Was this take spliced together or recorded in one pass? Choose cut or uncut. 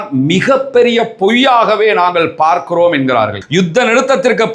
cut